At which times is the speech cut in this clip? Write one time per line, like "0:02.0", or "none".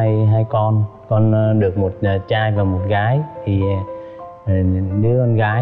none